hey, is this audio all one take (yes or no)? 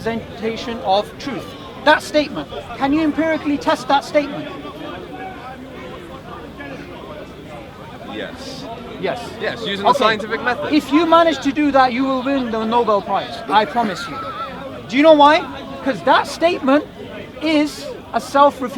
yes